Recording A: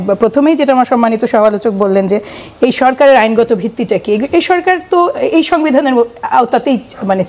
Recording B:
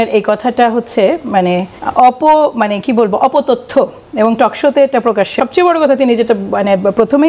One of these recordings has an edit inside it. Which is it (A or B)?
B